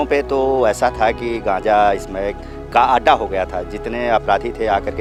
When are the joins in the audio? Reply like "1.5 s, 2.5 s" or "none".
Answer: none